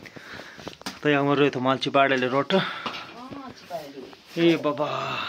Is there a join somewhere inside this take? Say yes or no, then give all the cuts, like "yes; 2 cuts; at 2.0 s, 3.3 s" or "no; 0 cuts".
no; 0 cuts